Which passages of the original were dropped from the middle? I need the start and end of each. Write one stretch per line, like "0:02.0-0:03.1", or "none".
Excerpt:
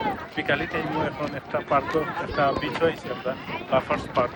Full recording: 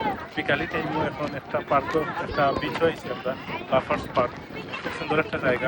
none